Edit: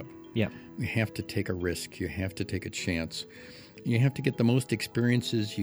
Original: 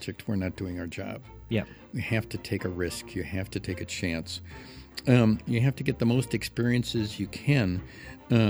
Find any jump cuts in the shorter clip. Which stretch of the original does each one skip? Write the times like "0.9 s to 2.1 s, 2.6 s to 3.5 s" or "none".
5.0 s to 5.4 s